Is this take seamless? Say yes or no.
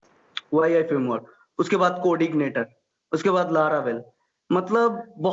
yes